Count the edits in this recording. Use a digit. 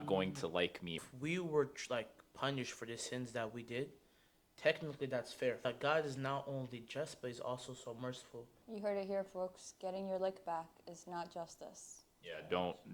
3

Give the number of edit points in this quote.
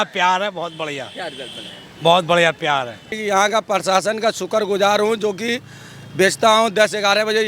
1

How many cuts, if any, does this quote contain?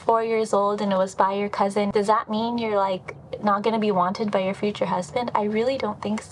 1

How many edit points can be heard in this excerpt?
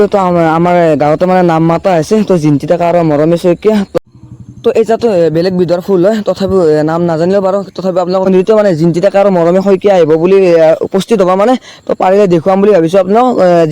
2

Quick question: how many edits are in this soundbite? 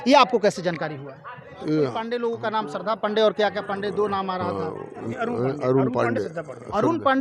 2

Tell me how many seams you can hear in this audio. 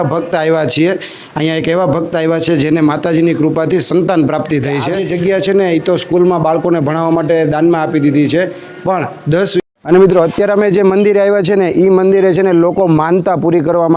2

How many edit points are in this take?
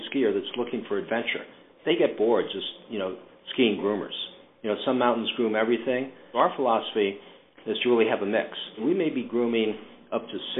3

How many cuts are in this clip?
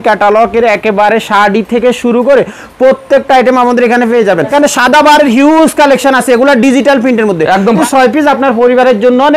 2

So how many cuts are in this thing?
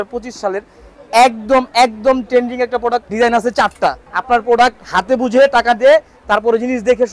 2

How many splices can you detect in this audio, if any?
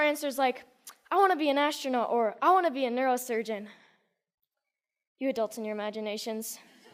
1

